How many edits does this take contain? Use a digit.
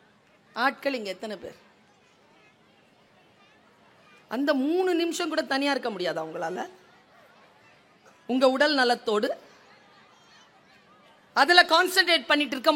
0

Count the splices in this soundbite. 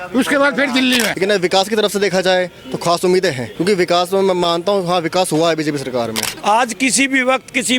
3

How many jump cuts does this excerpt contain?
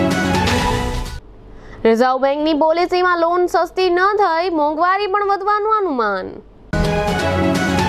1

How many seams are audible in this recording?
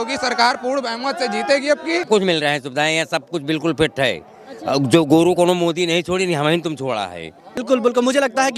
2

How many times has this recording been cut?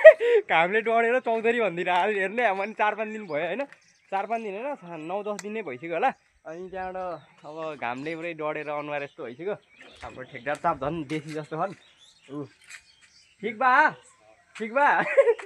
0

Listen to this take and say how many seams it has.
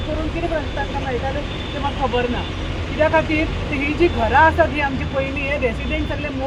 0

